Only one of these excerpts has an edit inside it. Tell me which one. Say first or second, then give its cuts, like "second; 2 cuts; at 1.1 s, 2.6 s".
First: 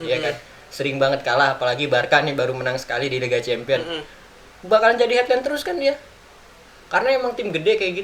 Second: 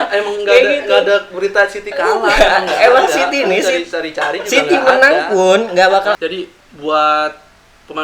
second; 1 cut; at 6.2 s